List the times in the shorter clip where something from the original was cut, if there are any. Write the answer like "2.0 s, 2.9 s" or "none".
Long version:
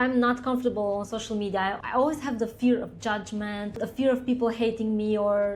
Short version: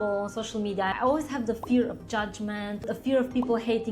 0.9 s